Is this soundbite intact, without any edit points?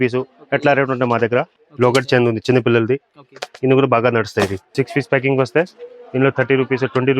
no; 2 cuts; at 1.6 s, 4.7 s

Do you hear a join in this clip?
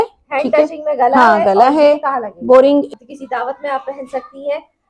yes; 1 cut; at 2.9 s

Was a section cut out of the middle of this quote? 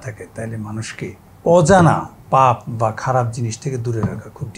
yes; 2 cuts; at 1.3 s, 2.1 s

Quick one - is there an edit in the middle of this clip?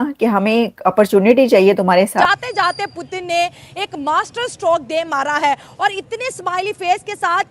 yes; 1 cut; at 2.2 s

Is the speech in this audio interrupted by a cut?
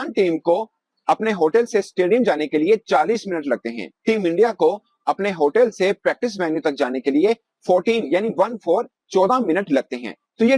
no; 0 cuts

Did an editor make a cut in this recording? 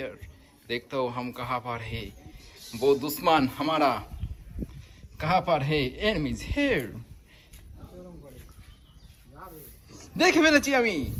no; 0 cuts

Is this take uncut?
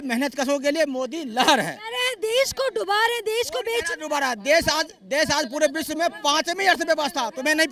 yes; 0 cuts

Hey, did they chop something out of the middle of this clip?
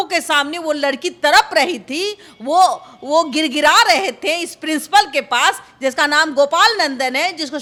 no; 0 cuts

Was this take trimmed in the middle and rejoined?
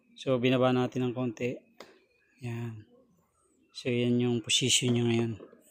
no; 0 cuts

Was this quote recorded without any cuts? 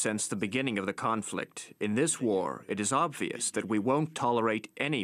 no; 1 cut; at 3.9 s

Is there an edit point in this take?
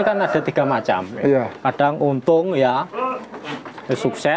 no; 0 cuts

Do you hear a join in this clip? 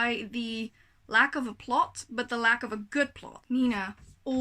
yes; 1 cut; at 3.3 s

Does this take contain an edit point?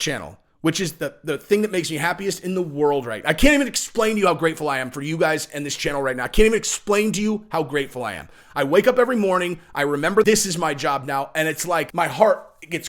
yes; 2 cuts; at 10.2 s, 11.9 s

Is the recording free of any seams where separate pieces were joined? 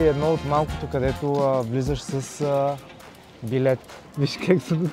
no; 1 cut; at 4.0 s

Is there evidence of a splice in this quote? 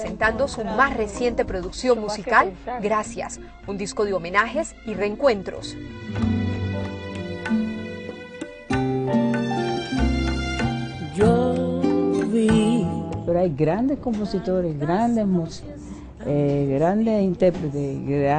yes; 1 cut; at 4.3 s

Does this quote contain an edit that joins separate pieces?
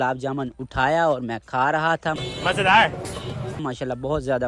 no; 0 cuts

